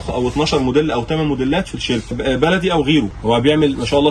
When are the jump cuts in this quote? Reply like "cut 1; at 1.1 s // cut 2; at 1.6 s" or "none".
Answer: cut 1; at 2.2 s // cut 2; at 3.1 s